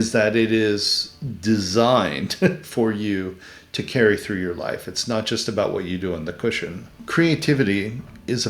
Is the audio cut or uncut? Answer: cut